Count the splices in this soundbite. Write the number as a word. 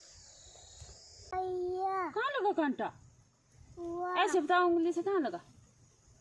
one